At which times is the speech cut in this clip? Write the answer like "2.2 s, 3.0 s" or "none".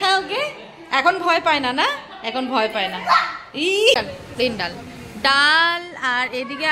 4.0 s